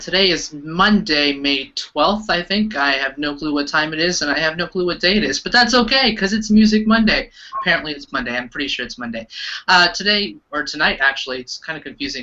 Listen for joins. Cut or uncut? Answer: uncut